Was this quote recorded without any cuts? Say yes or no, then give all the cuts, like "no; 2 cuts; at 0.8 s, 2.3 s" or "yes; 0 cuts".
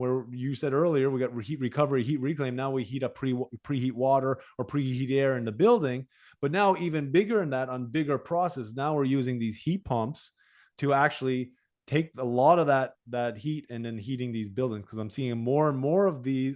yes; 0 cuts